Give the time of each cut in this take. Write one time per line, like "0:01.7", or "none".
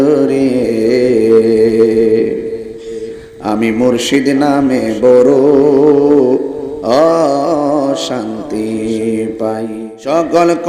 0:09.7